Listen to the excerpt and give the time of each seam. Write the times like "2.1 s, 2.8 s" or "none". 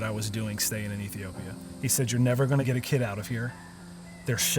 1.7 s